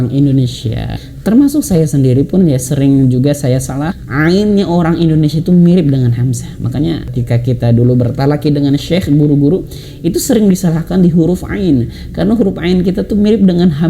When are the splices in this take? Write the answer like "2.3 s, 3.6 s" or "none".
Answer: 1.0 s, 3.9 s, 7.1 s